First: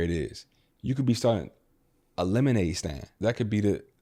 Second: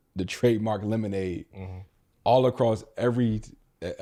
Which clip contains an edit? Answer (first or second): first